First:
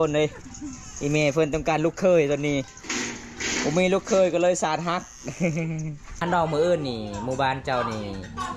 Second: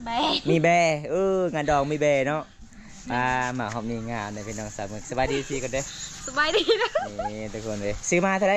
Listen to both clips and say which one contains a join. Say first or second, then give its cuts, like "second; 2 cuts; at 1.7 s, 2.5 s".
first; 1 cut; at 6.2 s